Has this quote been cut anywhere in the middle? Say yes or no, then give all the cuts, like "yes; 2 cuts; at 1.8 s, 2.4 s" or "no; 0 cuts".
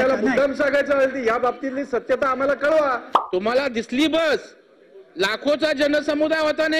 yes; 1 cut; at 3.1 s